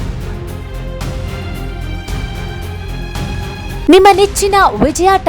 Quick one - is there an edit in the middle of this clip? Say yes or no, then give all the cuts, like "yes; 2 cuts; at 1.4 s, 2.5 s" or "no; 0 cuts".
no; 0 cuts